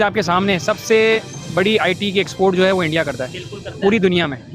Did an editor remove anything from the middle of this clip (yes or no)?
no